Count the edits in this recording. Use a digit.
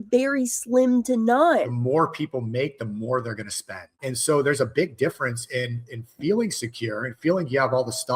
2